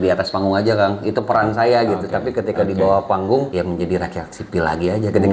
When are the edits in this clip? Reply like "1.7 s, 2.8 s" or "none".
3.5 s

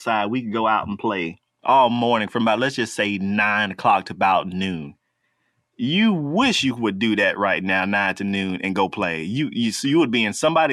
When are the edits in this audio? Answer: none

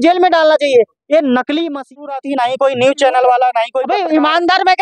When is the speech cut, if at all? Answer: 2.0 s, 3.8 s

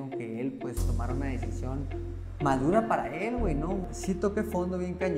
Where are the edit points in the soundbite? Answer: 3.9 s

